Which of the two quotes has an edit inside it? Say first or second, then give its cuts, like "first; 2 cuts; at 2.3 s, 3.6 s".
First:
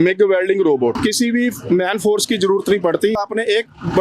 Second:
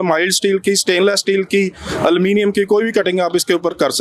first; 2 cuts; at 1.0 s, 3.2 s